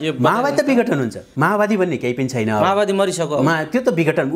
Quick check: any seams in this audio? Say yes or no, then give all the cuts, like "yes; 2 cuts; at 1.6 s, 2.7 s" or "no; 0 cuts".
yes; 1 cut; at 1.2 s